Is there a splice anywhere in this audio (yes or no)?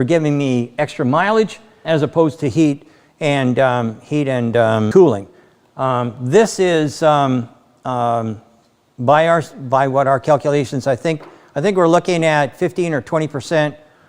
yes